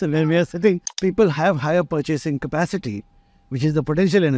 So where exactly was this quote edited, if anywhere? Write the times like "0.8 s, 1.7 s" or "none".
1.0 s